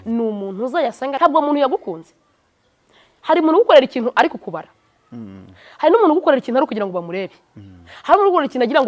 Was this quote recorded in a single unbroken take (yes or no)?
no